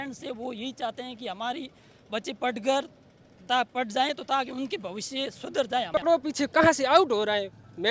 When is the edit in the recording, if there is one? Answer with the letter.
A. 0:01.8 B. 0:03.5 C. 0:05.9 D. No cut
C